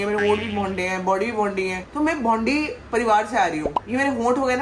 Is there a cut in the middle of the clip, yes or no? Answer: no